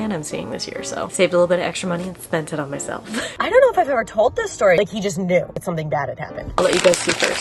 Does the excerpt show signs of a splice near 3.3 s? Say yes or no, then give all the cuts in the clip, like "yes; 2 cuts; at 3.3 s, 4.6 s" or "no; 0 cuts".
yes; 3 cuts; at 3.3 s, 4.8 s, 6.5 s